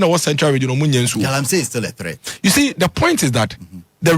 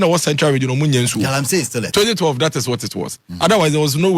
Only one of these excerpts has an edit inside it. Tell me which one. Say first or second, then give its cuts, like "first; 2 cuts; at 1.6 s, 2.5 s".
second; 1 cut; at 1.8 s